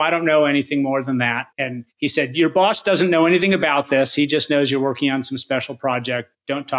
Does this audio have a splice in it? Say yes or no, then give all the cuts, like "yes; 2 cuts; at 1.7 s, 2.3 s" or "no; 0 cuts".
yes; 1 cut; at 1.5 s